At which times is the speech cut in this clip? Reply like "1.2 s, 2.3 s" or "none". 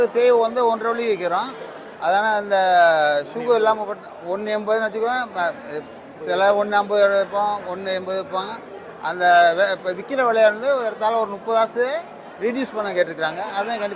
none

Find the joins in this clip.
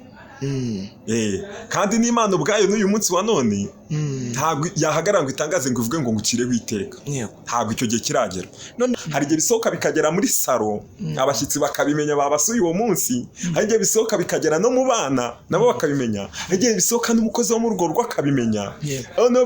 8.9 s

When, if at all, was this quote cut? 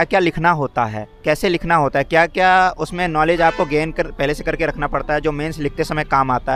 none

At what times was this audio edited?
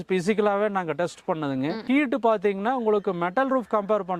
1.8 s

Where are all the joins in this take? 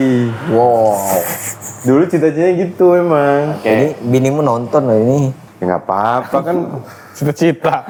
none

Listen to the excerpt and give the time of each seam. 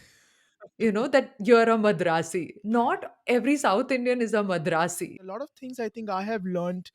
5.3 s

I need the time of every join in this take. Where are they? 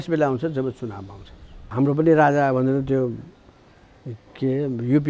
1.6 s

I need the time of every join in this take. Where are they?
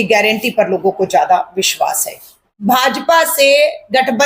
2.5 s

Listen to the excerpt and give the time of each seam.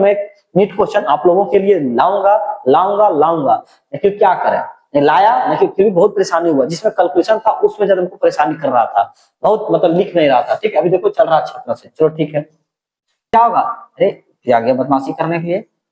13.3 s

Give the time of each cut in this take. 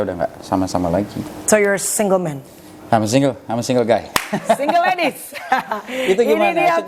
none

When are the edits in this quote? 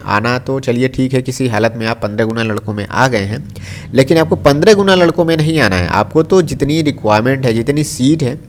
none

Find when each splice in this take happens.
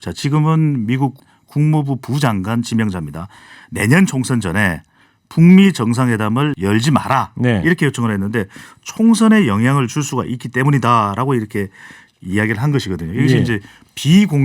1.2 s, 6.5 s

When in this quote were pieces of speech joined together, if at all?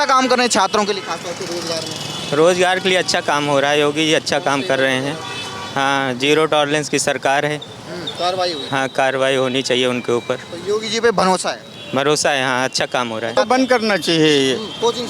8.1 s, 13.4 s

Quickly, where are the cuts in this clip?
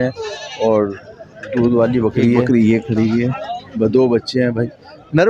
2.4 s

